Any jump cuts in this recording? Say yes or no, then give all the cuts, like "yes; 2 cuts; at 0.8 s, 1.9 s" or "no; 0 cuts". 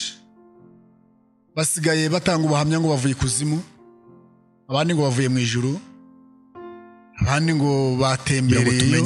no; 0 cuts